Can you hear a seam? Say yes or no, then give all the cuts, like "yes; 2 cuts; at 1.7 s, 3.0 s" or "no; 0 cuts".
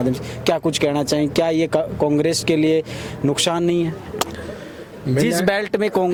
no; 0 cuts